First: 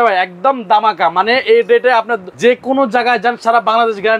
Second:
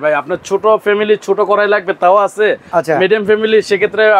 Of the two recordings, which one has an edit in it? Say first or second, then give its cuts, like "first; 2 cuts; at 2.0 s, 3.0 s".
first; 1 cut; at 2.2 s